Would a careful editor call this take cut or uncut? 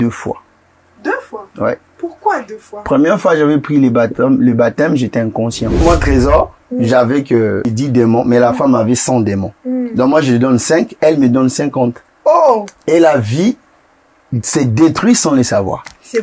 cut